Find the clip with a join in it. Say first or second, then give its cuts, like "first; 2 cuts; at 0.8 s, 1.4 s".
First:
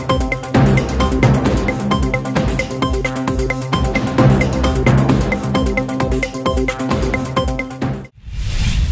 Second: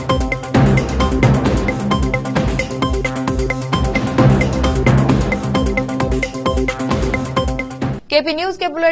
first; 1 cut; at 8.0 s